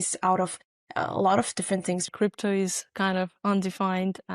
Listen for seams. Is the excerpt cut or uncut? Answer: cut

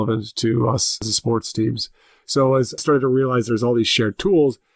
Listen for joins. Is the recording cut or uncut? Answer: cut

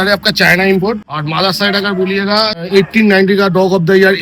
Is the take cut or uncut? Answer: cut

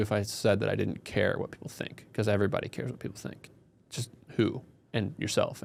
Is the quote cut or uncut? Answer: uncut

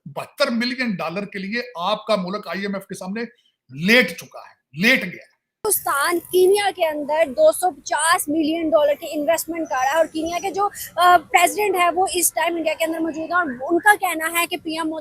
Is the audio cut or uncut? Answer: cut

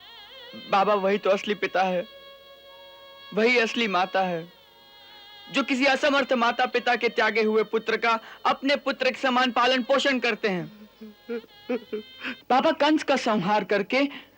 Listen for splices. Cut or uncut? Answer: cut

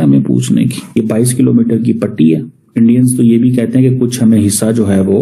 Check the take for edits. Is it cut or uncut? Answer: cut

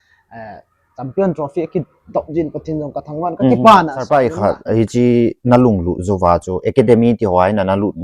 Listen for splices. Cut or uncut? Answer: cut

